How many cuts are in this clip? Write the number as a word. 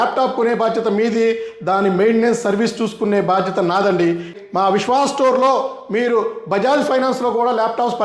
one